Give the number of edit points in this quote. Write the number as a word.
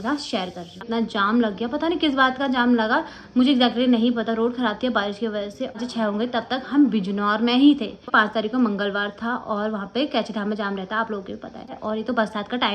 four